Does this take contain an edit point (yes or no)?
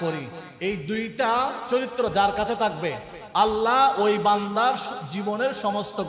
no